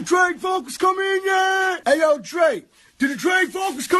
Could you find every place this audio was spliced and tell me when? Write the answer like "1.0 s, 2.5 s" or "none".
1.8 s